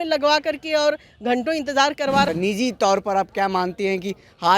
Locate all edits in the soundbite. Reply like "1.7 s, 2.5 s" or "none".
2.3 s